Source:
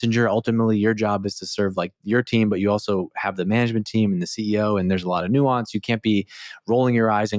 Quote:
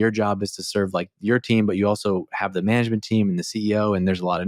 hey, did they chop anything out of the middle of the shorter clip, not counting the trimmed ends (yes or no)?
no